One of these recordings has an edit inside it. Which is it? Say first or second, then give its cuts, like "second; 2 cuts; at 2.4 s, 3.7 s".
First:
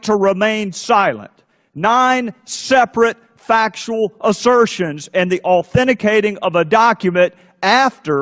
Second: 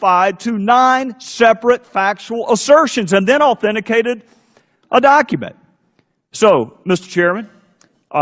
first; 1 cut; at 2.1 s